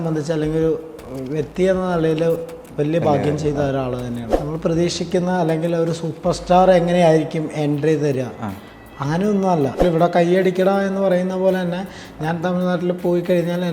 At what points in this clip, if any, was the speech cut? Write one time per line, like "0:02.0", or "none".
0:04.3
0:09.8